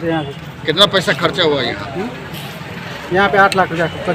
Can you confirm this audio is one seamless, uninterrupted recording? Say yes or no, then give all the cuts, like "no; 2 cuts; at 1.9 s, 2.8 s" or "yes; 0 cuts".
yes; 0 cuts